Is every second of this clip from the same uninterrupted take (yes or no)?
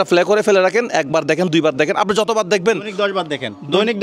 yes